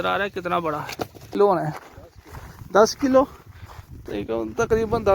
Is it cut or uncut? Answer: cut